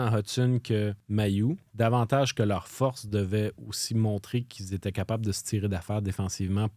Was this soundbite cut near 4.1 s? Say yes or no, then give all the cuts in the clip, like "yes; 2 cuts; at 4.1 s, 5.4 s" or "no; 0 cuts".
no; 1 cut; at 1.1 s